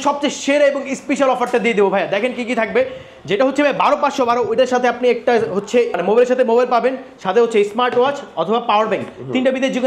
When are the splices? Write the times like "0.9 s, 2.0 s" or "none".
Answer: 5.9 s